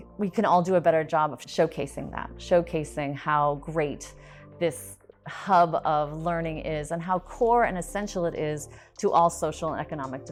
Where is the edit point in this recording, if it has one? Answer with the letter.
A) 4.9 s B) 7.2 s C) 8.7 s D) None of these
D